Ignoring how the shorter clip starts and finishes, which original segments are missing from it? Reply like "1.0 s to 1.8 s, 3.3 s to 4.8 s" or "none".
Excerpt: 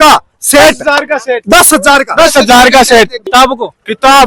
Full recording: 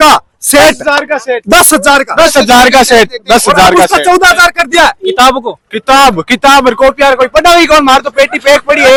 3.2 s to 5.0 s